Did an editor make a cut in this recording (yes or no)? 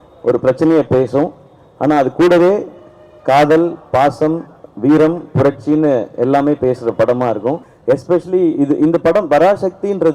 yes